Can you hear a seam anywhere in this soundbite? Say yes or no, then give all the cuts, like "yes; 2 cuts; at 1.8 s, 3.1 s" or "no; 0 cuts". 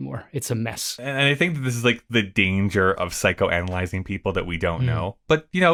no; 0 cuts